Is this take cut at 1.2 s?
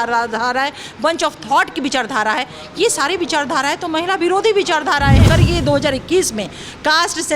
no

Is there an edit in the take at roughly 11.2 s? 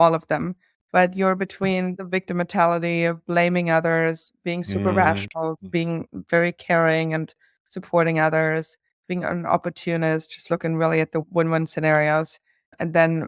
yes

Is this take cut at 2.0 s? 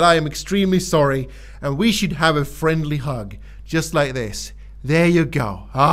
no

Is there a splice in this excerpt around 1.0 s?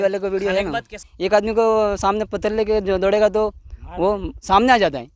yes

